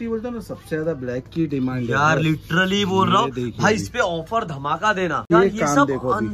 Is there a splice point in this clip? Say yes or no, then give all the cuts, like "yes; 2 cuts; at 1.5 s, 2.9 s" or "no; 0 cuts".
yes; 1 cut; at 5.3 s